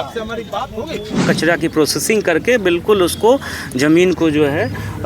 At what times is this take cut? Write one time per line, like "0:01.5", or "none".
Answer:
0:01.2